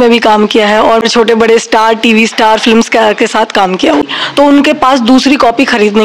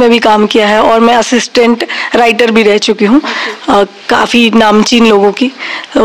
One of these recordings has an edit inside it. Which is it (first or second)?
first